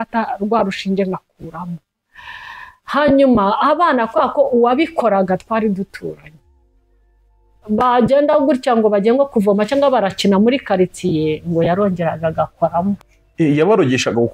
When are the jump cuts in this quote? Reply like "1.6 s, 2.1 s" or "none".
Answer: none